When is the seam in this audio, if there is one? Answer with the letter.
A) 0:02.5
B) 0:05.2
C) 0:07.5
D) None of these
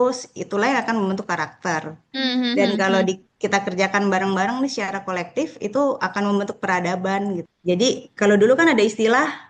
C